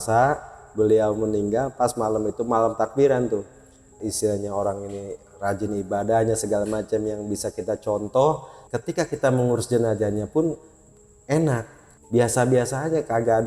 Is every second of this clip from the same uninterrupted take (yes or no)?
no